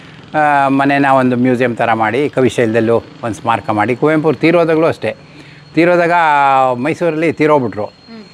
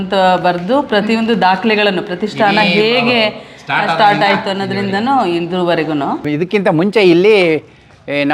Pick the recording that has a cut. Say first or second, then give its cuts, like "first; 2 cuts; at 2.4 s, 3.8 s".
second; 1 cut; at 6.2 s